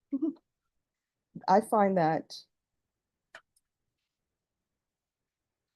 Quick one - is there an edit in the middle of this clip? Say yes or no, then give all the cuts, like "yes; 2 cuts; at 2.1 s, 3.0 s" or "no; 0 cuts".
no; 0 cuts